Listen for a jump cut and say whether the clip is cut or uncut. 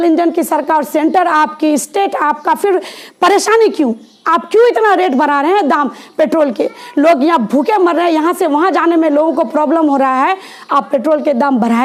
uncut